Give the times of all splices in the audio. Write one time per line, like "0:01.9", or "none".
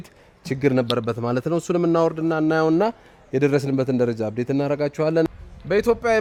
none